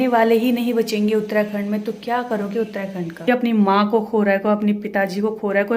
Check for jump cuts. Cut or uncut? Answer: cut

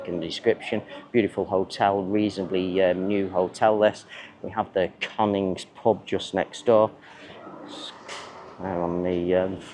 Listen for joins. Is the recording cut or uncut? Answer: uncut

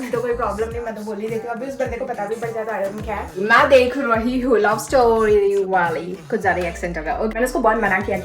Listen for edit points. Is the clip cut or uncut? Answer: cut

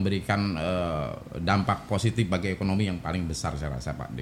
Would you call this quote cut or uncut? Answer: uncut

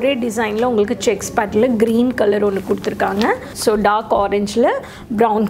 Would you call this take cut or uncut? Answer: uncut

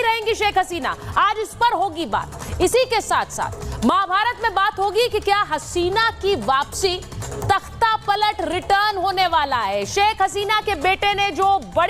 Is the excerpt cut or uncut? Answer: uncut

